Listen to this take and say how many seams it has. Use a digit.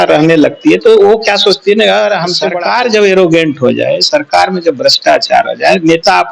1